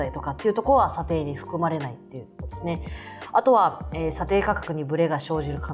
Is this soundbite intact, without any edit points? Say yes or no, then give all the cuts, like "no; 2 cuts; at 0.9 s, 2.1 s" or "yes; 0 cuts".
yes; 0 cuts